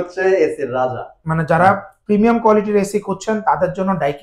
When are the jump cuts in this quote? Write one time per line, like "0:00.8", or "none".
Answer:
0:01.3